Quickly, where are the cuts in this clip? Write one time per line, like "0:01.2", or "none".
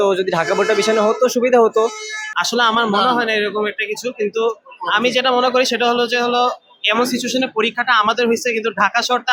none